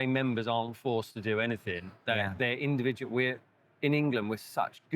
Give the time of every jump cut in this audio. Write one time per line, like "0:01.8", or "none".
none